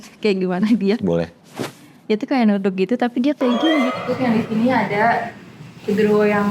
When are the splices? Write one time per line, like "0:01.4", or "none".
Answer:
0:03.9